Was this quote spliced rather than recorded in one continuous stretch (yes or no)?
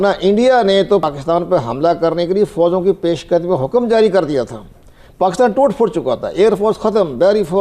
yes